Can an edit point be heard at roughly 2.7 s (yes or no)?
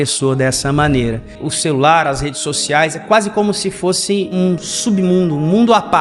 no